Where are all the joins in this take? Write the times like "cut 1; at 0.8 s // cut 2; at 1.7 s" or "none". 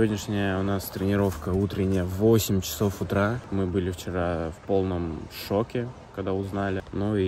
none